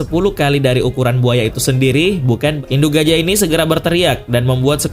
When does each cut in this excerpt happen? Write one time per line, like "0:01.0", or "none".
0:02.6

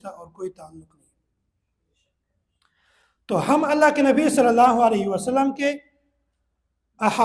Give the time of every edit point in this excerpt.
none

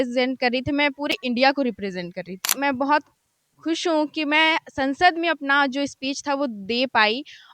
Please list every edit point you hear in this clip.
0:02.5

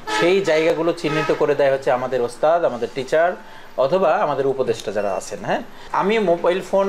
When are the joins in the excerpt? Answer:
0:05.8

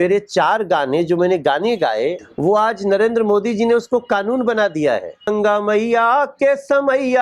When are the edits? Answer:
0:02.3
0:05.3

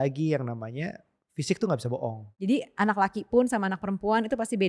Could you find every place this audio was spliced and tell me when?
0:02.3

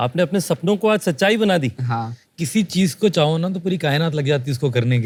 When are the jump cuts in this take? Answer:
none

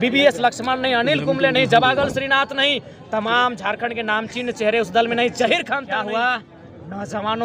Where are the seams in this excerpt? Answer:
0:05.8

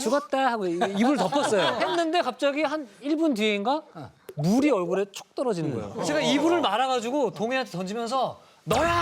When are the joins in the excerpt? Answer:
0:01.8
0:06.0

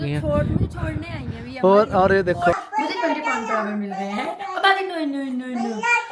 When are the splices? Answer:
0:02.5

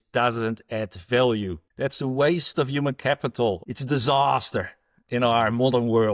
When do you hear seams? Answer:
0:01.6
0:03.7

